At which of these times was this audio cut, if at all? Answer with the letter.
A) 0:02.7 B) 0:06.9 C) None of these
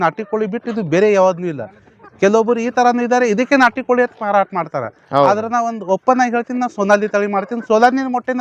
C